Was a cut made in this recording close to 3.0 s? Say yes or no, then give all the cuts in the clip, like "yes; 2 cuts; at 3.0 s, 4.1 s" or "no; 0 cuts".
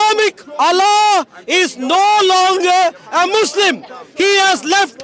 no; 0 cuts